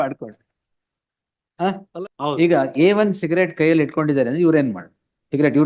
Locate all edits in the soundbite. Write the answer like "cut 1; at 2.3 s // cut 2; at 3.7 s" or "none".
cut 1; at 1.9 s

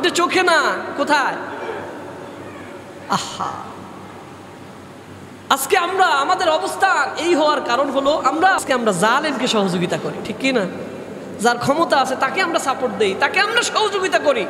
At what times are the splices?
cut 1; at 8.6 s

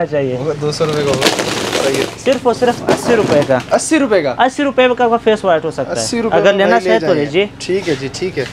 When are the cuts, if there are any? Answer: none

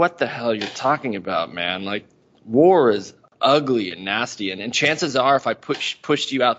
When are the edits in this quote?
none

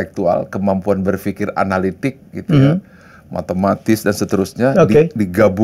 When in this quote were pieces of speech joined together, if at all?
none

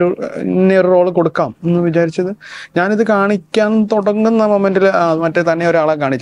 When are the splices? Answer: none

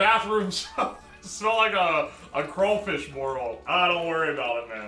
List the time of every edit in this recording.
cut 1; at 3.6 s

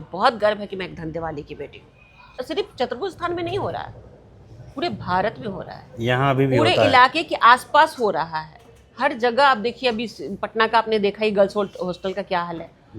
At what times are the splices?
cut 1; at 2.4 s

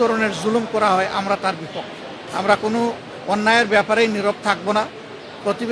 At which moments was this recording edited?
cut 1; at 2.2 s

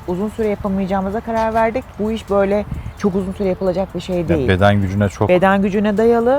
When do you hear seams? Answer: cut 1; at 1.9 s

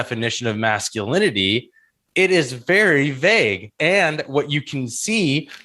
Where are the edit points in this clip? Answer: cut 1; at 3.8 s

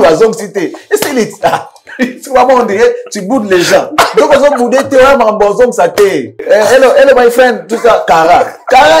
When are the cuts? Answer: cut 1; at 6.4 s

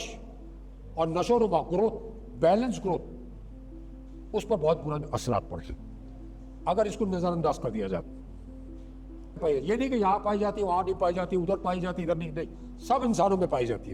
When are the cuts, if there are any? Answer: cut 1; at 9.4 s

